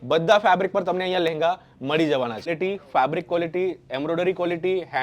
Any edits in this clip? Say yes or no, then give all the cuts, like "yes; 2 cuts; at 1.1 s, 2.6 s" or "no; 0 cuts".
yes; 1 cut; at 2.5 s